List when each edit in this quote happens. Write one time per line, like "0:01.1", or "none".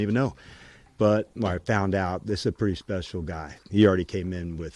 0:01.3
0:03.6